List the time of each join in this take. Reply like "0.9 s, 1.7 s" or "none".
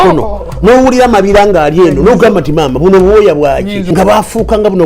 3.8 s